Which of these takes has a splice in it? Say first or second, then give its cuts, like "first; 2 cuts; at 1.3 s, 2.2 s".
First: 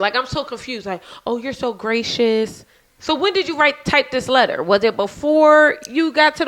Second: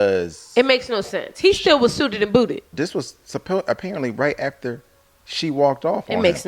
second; 1 cut; at 2.7 s